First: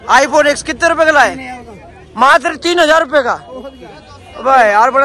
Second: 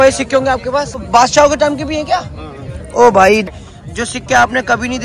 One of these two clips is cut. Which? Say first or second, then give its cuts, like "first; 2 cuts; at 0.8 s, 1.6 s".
second; 2 cuts; at 1.0 s, 3.5 s